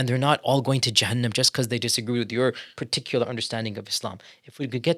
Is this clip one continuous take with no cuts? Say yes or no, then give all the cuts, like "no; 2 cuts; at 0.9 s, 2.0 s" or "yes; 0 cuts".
yes; 0 cuts